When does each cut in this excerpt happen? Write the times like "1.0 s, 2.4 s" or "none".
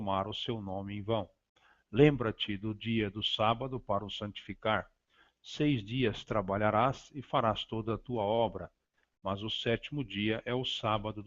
0.9 s